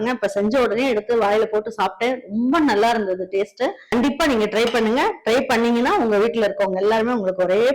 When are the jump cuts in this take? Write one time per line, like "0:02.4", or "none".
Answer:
0:03.8